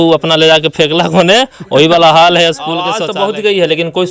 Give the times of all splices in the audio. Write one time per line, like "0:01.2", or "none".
0:03.0